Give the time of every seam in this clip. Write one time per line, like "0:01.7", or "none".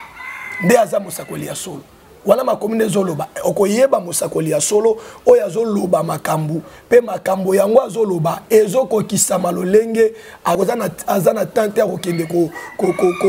0:10.6